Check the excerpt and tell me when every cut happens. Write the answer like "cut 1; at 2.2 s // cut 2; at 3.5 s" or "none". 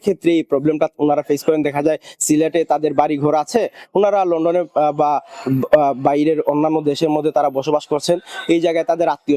none